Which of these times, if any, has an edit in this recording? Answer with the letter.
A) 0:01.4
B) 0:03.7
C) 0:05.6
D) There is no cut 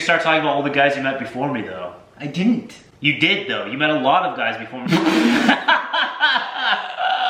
D